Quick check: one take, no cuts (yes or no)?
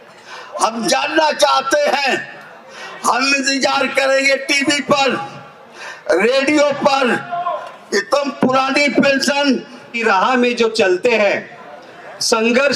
no